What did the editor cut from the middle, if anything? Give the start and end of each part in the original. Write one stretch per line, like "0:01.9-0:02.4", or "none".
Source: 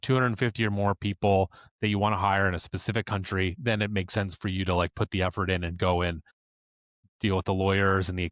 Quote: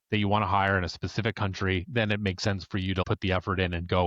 0:04.7-0:04.9